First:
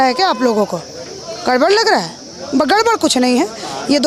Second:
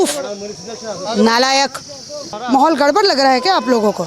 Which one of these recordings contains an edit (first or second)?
second